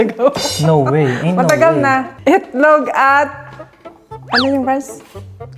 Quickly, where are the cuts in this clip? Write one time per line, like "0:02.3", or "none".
0:02.1